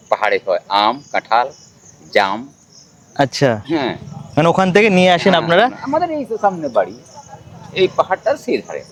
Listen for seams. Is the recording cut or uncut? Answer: uncut